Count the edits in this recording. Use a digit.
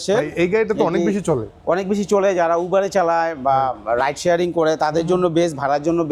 0